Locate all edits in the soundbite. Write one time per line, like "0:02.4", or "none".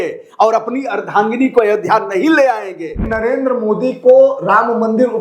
0:03.1